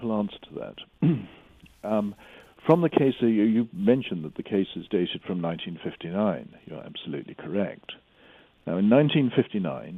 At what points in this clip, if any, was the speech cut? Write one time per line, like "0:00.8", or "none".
none

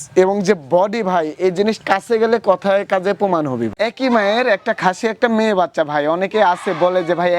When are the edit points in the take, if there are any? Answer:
0:03.7

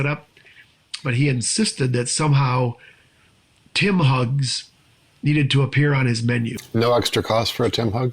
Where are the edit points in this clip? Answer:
0:06.6

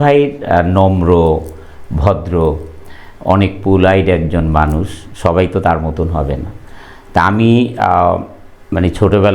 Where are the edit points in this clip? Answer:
none

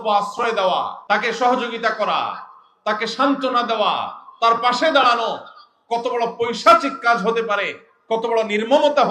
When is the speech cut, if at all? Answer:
0:01.0

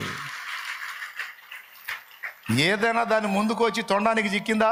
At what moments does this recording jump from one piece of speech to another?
none

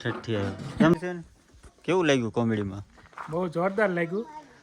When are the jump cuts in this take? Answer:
0:00.9

